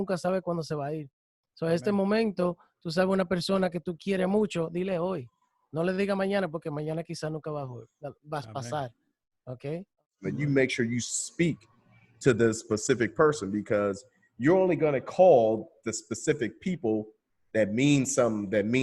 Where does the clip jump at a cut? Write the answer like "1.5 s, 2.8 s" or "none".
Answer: 9.8 s